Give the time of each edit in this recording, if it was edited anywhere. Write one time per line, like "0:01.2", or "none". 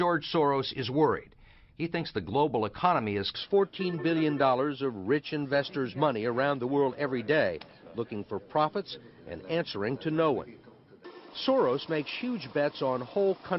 none